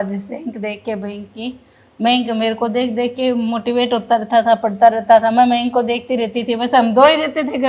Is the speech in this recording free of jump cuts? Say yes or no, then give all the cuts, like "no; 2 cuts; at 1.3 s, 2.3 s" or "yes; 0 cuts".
yes; 0 cuts